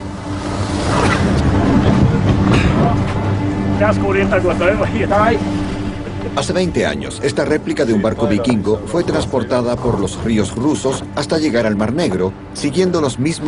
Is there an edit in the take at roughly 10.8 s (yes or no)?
no